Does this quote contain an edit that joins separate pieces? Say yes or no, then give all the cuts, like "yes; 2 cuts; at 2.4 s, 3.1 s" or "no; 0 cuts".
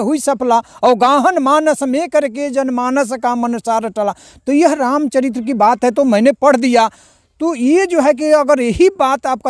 no; 0 cuts